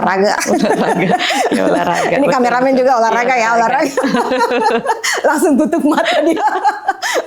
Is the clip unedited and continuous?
yes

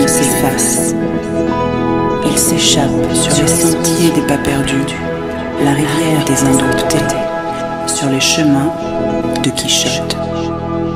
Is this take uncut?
yes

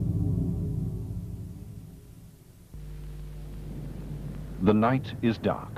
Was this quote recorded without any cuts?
yes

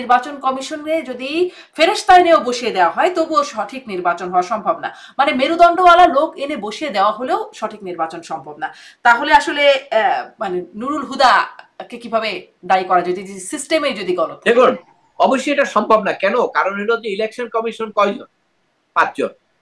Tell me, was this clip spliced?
no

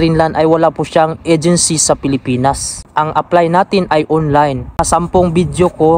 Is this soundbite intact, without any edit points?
no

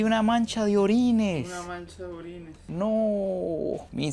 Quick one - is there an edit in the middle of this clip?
no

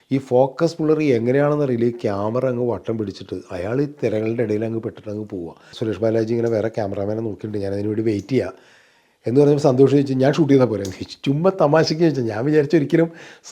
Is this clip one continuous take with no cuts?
no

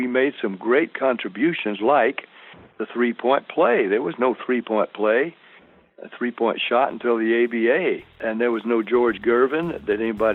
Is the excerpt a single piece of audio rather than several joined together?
no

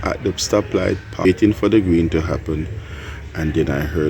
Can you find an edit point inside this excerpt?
yes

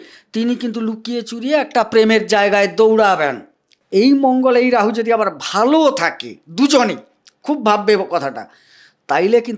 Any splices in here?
yes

